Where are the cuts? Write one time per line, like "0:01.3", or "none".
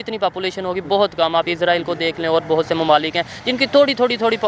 none